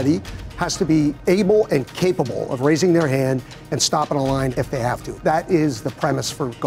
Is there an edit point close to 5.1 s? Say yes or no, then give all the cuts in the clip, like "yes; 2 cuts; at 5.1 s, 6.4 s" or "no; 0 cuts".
yes; 1 cut; at 5.1 s